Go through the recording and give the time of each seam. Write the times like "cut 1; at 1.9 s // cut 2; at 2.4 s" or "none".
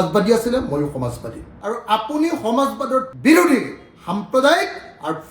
cut 1; at 1.5 s